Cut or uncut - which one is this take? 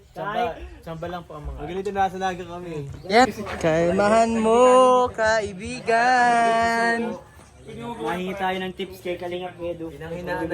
cut